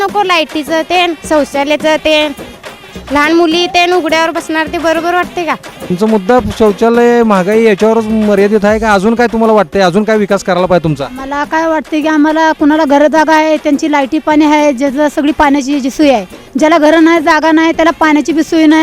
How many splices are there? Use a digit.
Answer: 1